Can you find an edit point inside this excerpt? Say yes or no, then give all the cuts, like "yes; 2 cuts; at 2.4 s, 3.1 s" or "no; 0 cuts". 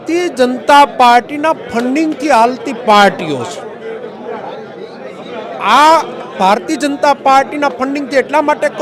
no; 0 cuts